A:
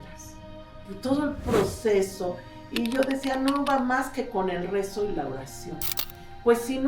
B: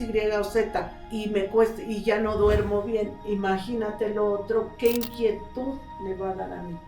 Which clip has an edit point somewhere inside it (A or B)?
B